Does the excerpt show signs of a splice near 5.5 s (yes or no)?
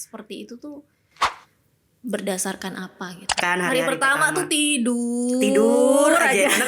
no